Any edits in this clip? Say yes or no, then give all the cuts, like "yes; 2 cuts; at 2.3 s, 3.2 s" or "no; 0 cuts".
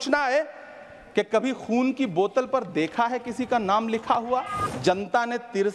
yes; 1 cut; at 4.6 s